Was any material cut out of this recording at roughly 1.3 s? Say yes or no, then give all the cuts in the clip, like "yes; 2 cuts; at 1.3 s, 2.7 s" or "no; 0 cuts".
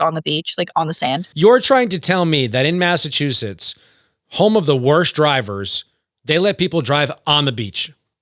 yes; 1 cut; at 1.3 s